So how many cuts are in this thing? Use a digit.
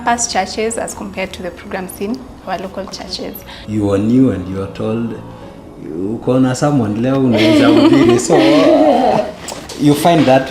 1